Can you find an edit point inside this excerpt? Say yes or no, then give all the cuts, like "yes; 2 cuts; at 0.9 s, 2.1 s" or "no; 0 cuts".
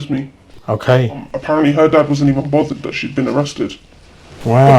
yes; 1 cut; at 1.3 s